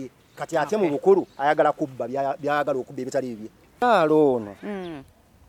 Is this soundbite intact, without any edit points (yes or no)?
no